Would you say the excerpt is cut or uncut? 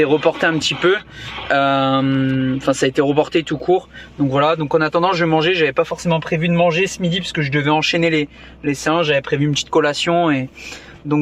uncut